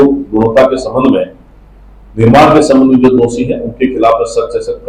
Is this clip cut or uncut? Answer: uncut